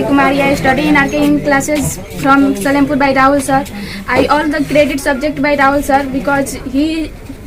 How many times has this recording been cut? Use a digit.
0